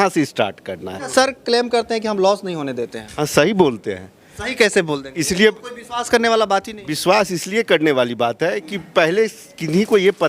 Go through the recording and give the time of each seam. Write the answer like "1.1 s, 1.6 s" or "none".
1.0 s